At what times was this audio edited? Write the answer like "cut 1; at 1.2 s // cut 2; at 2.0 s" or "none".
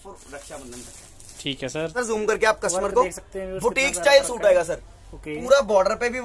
cut 1; at 2.0 s